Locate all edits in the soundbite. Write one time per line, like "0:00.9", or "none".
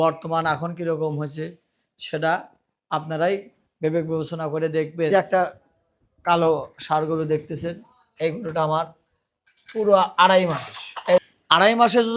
0:05.1
0:11.2